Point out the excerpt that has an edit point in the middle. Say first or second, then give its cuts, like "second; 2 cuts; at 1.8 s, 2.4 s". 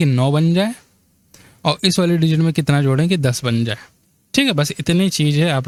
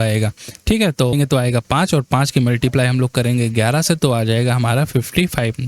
second; 1 cut; at 1.1 s